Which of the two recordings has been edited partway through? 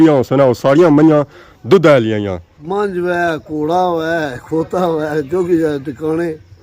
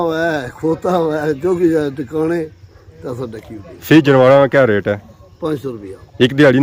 first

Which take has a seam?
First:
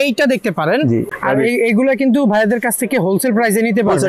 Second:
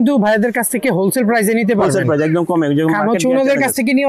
first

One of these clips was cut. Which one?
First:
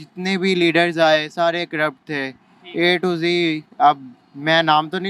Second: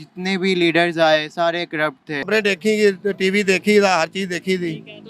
second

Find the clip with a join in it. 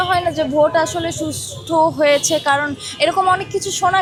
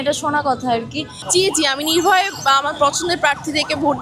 second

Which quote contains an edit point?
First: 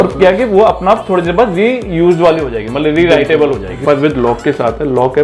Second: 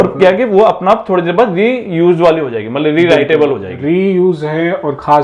first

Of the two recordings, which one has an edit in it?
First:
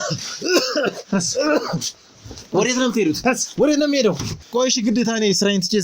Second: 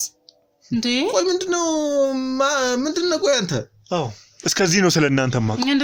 first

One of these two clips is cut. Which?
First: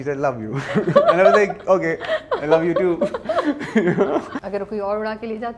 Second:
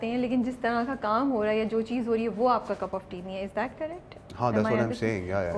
first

